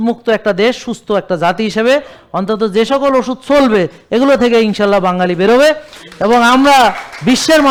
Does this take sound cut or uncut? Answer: uncut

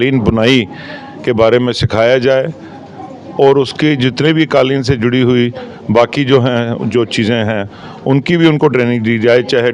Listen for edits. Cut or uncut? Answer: uncut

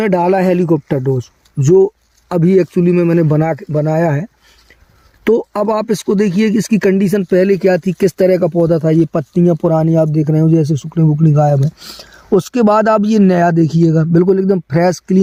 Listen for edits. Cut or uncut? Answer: uncut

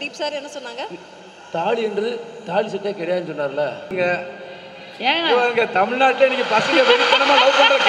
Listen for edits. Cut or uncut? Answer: cut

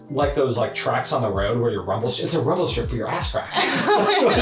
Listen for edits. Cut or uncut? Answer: uncut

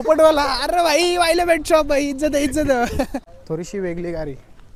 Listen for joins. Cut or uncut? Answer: uncut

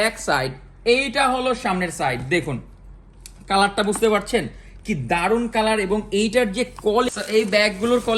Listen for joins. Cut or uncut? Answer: cut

